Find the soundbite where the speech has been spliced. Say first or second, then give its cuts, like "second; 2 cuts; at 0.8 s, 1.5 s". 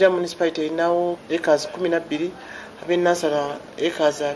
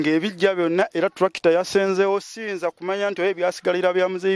first; 1 cut; at 1.2 s